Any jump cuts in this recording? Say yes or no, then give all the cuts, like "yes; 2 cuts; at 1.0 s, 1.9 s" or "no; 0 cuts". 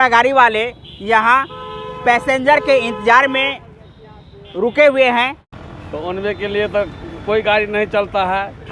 yes; 1 cut; at 5.4 s